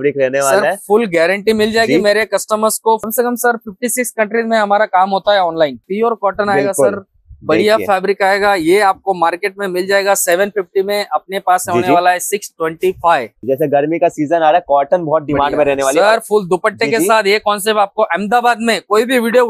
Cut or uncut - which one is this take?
cut